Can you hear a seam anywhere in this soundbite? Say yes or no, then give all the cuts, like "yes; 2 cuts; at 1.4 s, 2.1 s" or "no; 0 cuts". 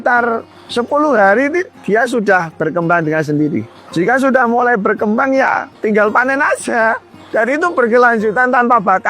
yes; 1 cut; at 3.7 s